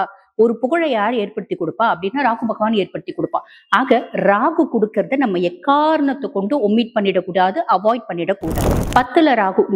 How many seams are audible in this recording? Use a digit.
1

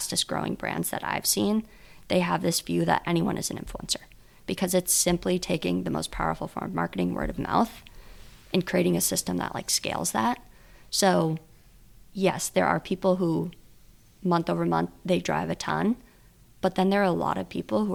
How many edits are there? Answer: 0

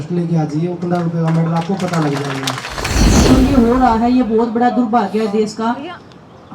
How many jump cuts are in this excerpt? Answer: 1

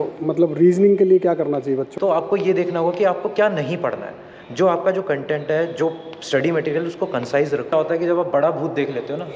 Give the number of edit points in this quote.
2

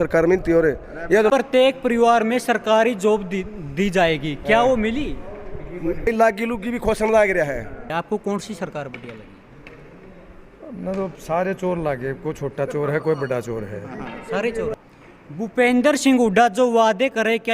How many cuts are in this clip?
4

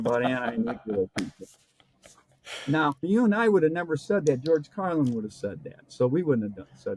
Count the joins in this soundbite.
1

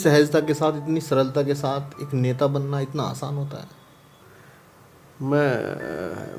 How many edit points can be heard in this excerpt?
1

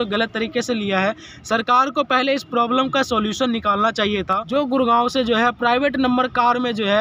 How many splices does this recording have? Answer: 1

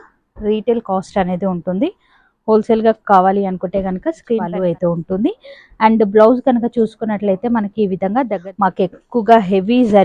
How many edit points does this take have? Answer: 2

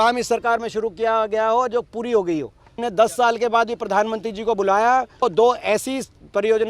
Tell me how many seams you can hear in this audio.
2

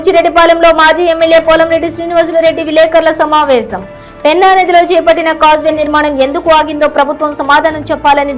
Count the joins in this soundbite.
0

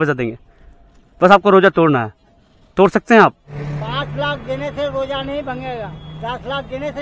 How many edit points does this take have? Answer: 2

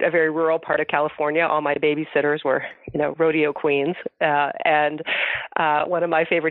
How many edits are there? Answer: 0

